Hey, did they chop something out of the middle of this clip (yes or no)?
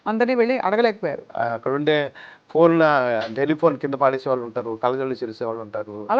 yes